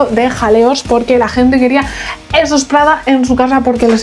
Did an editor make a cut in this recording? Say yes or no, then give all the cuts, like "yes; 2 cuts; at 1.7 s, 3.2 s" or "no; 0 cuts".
no; 0 cuts